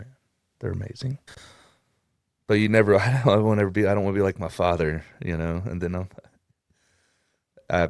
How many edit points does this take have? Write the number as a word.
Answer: one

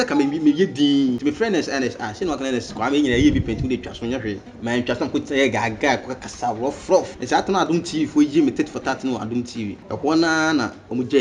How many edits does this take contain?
four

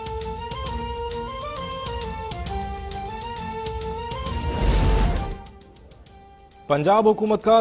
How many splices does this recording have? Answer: one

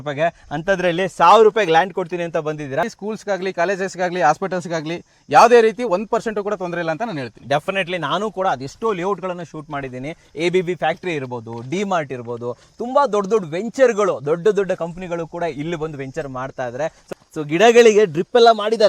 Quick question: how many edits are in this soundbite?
two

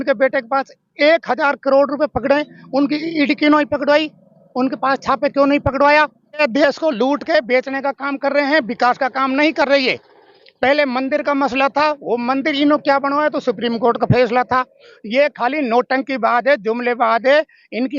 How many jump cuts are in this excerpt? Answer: one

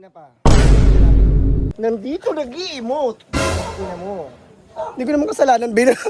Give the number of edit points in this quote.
one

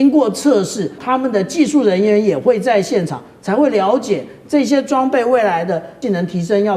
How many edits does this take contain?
two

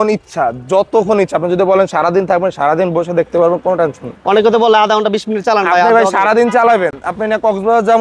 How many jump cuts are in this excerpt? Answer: zero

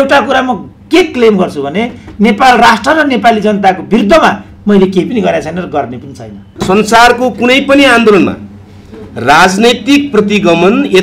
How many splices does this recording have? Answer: one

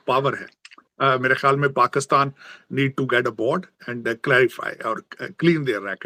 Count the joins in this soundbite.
zero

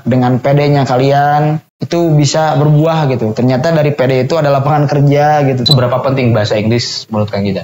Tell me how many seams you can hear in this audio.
two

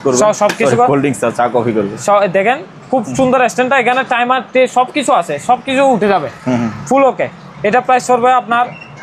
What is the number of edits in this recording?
zero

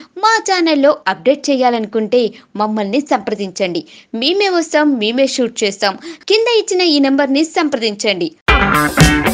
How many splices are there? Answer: zero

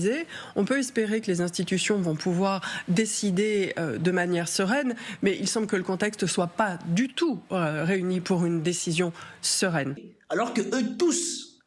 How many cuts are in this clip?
one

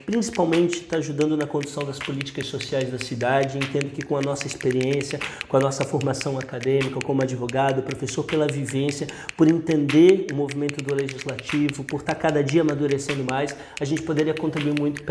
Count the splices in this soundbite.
zero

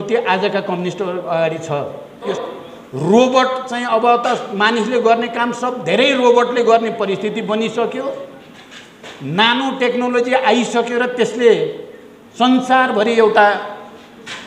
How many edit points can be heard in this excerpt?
one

